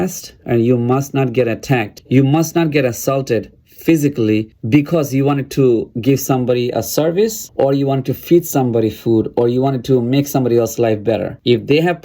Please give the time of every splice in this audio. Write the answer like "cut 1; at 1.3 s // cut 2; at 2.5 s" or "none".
none